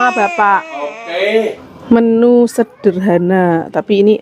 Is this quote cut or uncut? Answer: cut